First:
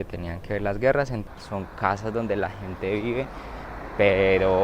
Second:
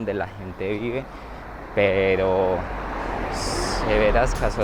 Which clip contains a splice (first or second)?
first